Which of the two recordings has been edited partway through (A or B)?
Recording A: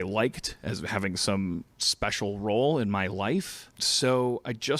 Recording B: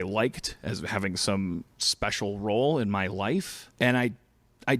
A